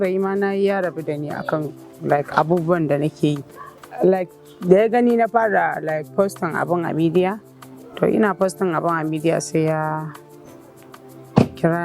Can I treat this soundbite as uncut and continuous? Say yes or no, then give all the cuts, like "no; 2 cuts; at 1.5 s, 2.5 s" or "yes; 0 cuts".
yes; 0 cuts